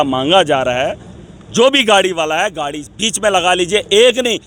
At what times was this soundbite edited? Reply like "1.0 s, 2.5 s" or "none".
none